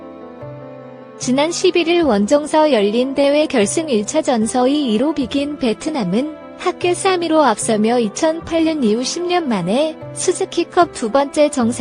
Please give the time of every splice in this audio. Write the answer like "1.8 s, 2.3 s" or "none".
1.2 s